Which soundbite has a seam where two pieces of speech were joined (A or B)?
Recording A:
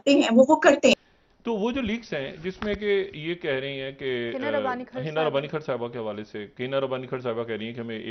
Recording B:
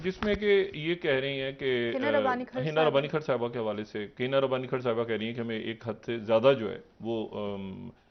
A